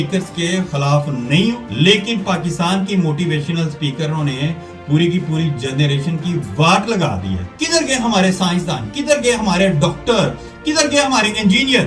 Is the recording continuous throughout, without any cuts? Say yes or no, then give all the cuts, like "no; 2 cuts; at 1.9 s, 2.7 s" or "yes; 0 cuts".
yes; 0 cuts